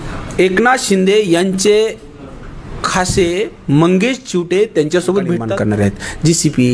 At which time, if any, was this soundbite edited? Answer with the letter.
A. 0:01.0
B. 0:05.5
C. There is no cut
B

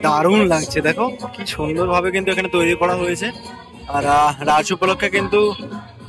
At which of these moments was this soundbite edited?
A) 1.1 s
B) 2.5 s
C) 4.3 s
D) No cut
D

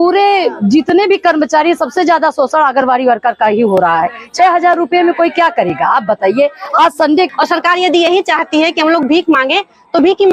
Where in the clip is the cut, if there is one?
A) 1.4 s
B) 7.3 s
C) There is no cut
B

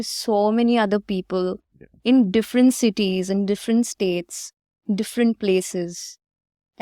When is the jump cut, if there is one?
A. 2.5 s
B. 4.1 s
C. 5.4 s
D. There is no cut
D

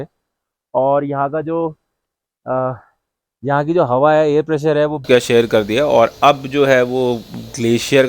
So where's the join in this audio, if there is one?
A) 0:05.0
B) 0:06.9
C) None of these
A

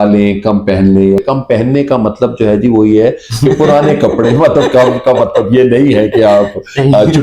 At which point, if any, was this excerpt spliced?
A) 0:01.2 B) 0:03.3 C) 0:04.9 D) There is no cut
A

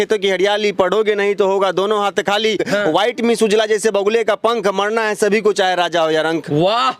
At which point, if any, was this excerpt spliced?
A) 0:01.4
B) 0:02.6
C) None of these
B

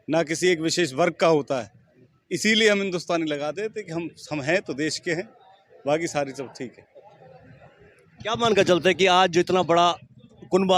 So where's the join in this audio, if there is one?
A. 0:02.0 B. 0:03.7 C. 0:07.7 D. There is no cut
D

